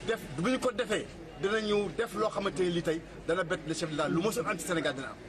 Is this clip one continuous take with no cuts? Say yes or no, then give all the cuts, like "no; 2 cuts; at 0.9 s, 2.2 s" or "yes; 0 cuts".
no; 1 cut; at 1.9 s